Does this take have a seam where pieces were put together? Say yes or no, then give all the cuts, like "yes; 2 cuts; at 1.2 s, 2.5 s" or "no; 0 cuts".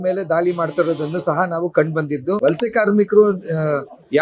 yes; 1 cut; at 2.4 s